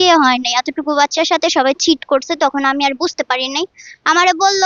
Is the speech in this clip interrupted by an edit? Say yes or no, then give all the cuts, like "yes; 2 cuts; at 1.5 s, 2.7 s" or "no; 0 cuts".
no; 0 cuts